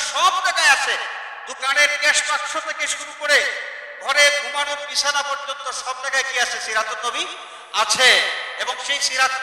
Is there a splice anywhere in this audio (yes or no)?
no